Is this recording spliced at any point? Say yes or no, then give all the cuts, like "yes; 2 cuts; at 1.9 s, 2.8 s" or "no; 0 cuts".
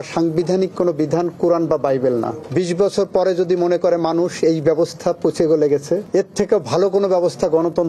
yes; 1 cut; at 2.5 s